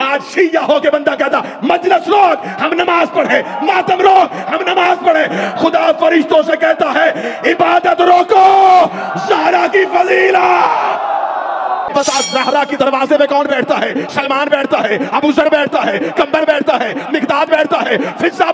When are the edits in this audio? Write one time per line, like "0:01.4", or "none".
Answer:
0:11.9